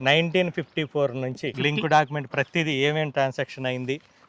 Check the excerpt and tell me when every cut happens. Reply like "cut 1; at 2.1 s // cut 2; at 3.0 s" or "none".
cut 1; at 1.6 s